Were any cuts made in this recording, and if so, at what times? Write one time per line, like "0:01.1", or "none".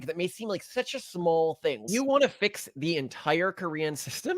0:01.9